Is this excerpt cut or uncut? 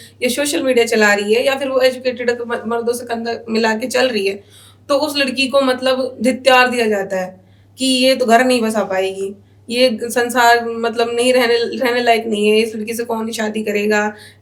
uncut